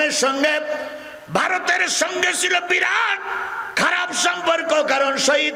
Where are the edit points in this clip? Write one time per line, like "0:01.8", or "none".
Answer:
none